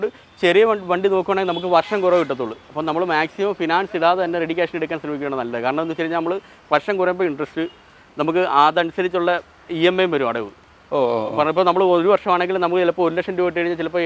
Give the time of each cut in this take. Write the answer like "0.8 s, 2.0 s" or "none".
none